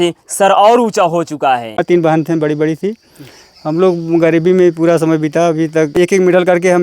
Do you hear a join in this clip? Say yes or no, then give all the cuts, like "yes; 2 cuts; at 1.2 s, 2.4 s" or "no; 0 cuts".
yes; 2 cuts; at 1.8 s, 5.9 s